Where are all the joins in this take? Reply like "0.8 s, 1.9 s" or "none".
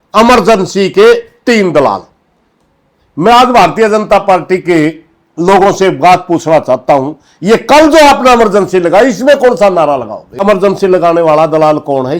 10.4 s